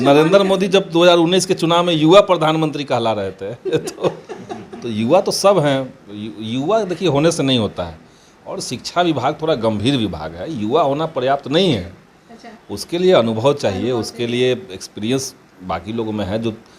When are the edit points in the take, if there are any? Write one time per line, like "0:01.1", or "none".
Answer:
none